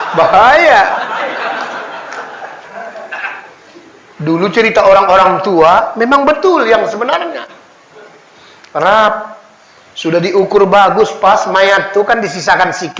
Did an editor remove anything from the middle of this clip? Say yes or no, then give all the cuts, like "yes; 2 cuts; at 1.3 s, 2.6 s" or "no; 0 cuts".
yes; 1 cut; at 2.5 s